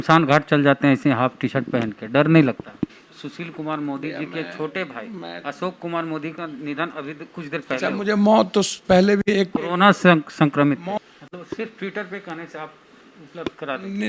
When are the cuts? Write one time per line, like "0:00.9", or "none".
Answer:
0:03.0
0:10.9

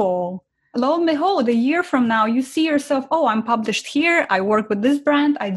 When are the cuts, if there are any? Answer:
none

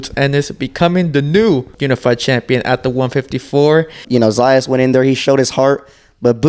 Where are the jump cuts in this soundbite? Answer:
0:01.7
0:04.0

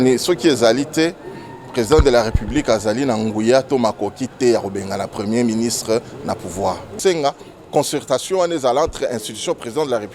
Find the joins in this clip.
0:07.0

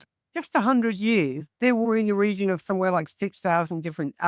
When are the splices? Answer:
0:01.9

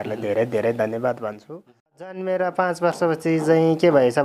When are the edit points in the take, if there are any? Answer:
0:02.2

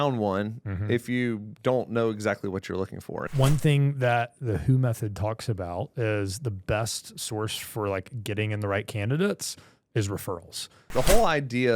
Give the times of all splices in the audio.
0:03.3
0:10.9

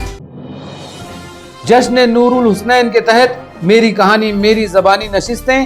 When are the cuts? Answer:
0:01.2

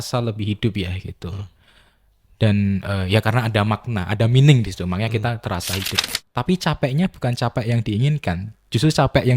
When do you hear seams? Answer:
0:06.0

